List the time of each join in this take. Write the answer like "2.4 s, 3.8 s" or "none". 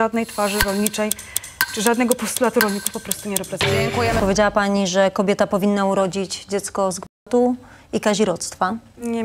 4.2 s